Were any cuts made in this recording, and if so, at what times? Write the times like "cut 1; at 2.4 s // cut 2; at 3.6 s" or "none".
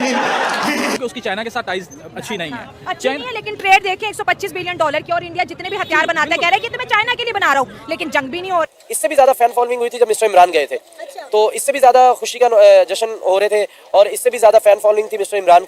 cut 1; at 8.7 s